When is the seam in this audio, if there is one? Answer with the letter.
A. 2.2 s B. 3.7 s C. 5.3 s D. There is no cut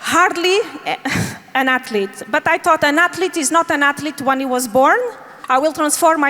C